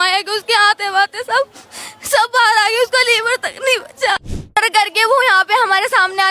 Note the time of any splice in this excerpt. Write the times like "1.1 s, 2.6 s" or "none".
4.5 s